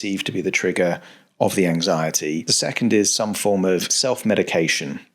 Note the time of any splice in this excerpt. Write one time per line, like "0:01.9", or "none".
0:02.5
0:03.9

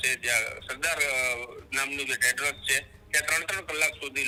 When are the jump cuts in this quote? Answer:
none

